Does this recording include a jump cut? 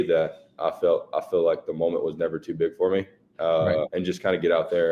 yes; 1 cut; at 3.9 s

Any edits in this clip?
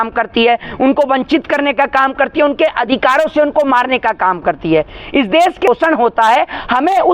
yes; 1 cut; at 5.7 s

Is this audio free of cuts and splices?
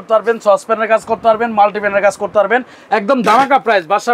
no; 1 cut; at 2.8 s

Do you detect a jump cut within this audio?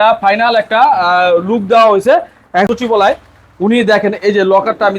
yes; 1 cut; at 2.7 s

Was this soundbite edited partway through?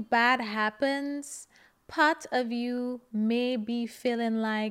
no; 0 cuts

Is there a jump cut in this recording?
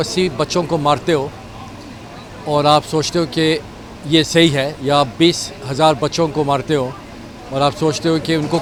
no; 0 cuts

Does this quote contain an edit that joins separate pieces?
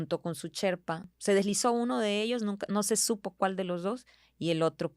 yes; 1 cut; at 1.1 s

